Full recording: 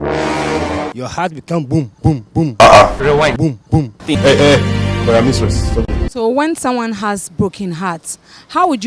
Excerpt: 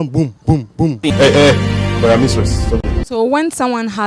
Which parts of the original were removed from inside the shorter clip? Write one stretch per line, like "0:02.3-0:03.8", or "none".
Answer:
0:02.5-0:04.0